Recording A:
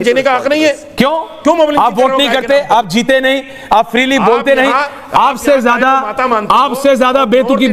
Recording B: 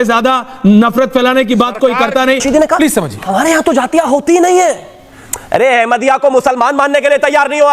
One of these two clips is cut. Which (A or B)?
B